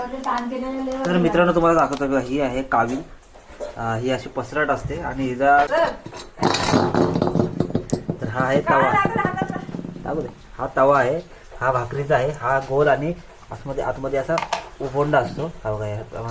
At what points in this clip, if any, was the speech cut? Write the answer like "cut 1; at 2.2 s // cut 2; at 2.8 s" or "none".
cut 1; at 5.7 s